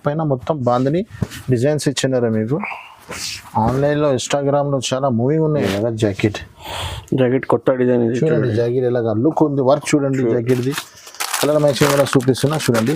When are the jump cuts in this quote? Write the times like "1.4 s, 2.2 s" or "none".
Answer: 5.6 s